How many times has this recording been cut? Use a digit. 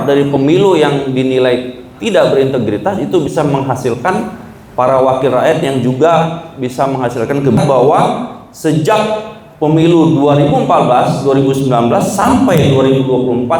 1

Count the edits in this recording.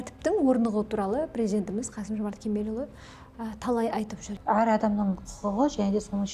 1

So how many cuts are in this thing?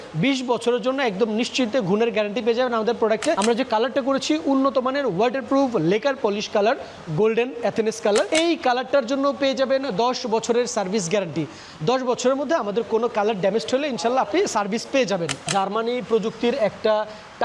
3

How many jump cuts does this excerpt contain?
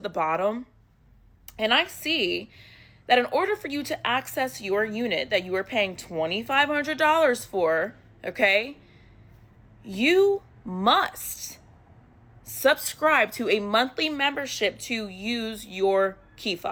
0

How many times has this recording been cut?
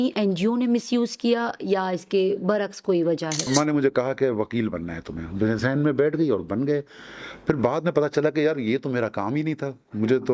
1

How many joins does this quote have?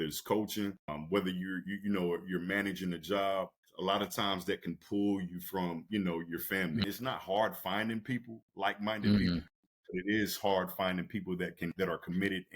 4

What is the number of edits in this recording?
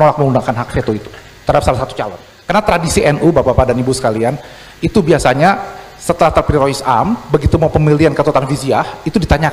1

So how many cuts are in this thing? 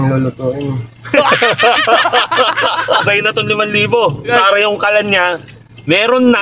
2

